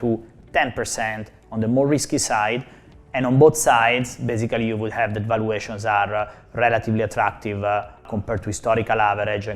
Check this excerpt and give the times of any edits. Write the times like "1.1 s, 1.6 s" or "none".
8.1 s